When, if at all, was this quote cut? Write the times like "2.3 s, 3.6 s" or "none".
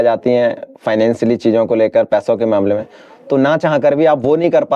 none